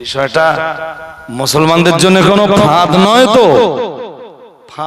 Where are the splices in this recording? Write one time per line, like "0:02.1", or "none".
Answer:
none